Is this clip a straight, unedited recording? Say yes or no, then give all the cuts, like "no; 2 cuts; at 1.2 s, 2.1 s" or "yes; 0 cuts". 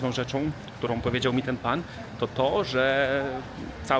yes; 0 cuts